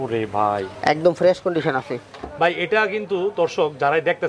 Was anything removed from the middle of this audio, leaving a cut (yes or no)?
no